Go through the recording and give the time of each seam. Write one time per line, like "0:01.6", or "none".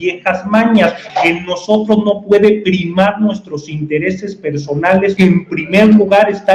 0:01.0
0:05.1